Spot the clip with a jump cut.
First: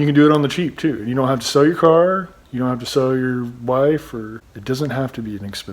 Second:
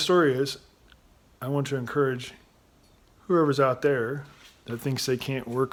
first; 1 cut; at 4.4 s

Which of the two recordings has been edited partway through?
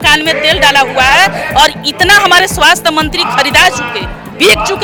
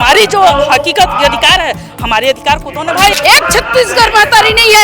second; 1 cut; at 3.1 s

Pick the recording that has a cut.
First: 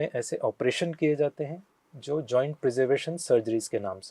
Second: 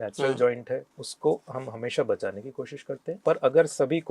second; 2 cuts; at 0.9 s, 3.2 s

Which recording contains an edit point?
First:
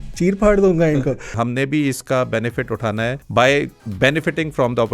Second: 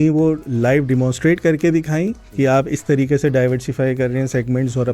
first; 3 cuts; at 1.3 s, 3.2 s, 3.8 s

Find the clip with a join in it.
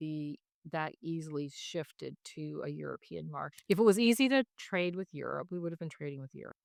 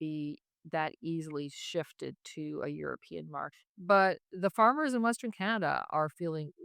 second; 1 cut; at 3.6 s

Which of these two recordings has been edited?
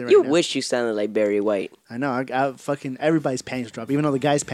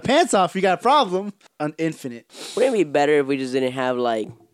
second; 1 cut; at 1.9 s

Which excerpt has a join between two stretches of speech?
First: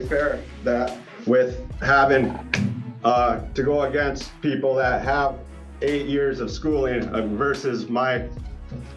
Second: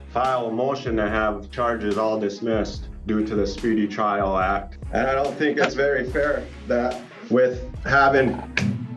second; 2 cuts; at 2.9 s, 4.8 s

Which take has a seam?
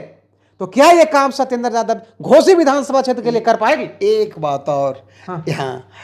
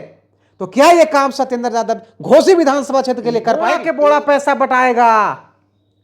second; 1 cut; at 3.8 s

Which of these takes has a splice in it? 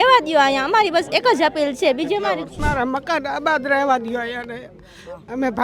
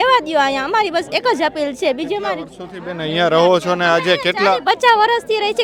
first; 1 cut; at 2.5 s

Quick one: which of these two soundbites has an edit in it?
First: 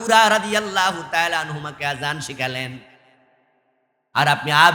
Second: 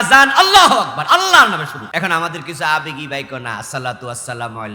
second; 1 cut; at 1.8 s

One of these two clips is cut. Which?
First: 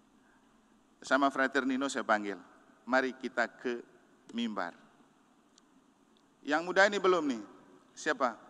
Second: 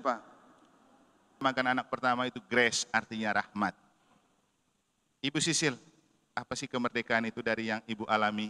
second; 1 cut; at 1.4 s

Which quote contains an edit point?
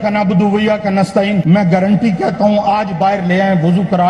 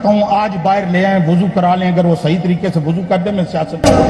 first; 1 cut; at 1.4 s

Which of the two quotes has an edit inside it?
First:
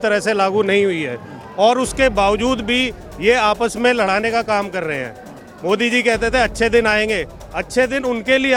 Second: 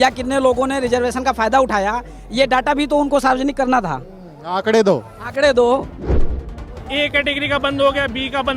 second; 1 cut; at 6.2 s

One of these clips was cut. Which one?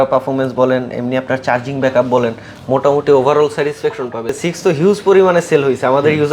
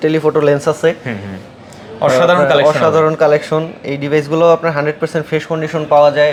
first; 1 cut; at 4.3 s

